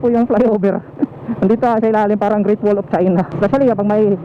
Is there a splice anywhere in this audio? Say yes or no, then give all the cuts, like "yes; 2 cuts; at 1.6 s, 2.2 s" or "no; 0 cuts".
yes; 1 cut; at 3.3 s